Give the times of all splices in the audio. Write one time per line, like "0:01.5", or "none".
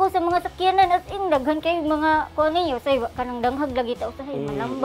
0:03.2

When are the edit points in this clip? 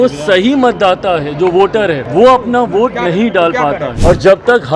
0:02.0
0:03.9

